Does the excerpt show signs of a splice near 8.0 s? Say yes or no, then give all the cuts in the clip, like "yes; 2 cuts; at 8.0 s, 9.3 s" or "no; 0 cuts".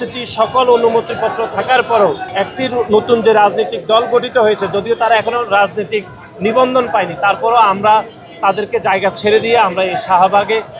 no; 1 cut; at 2.2 s